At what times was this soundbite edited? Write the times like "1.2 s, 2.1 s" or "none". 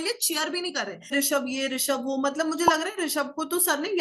1.1 s